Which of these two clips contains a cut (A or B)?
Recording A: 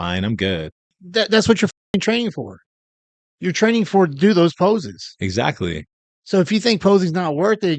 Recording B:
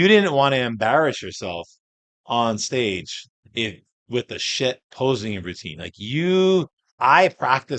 A